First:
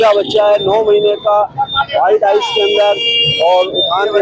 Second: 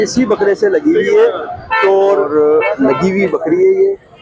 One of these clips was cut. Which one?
second; 1 cut; at 2.3 s

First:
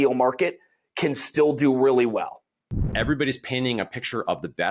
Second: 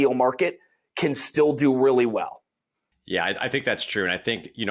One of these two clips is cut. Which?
first; 1 cut; at 2.9 s

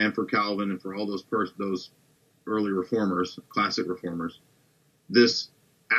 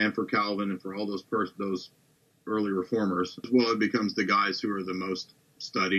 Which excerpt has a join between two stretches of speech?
second; 1 cut; at 3.5 s

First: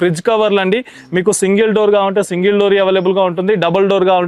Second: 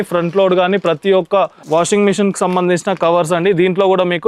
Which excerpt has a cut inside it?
second; 1 cut; at 1.6 s

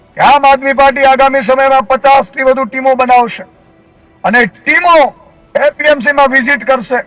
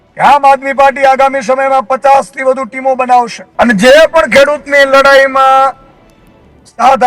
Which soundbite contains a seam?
second; 1 cut; at 3.4 s

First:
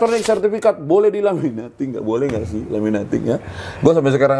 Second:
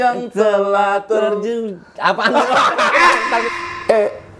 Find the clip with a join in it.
second; 1 cut; at 3.4 s

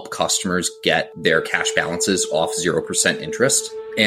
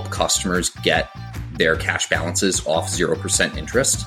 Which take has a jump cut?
first; 1 cut; at 1.1 s

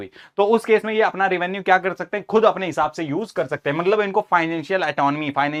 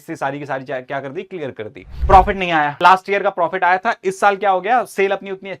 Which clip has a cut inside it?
second; 2 cuts; at 1.9 s, 2.8 s

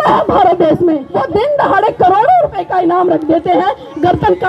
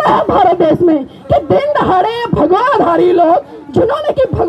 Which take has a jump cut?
first; 1 cut; at 1.1 s

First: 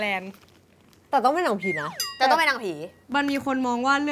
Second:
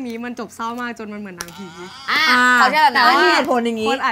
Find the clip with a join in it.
first; 1 cut; at 1.0 s

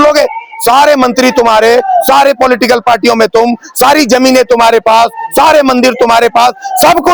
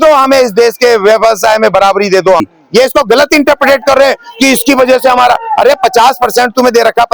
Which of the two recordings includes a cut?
second; 1 cut; at 2.4 s

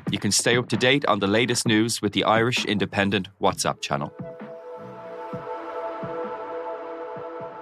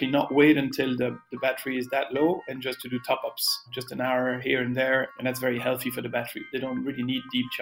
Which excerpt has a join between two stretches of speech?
second; 3 cuts; at 3.7 s, 5.1 s, 6.5 s

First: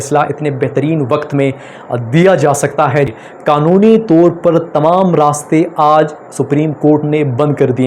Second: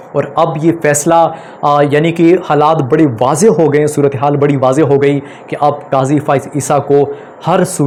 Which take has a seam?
first; 1 cut; at 3.1 s

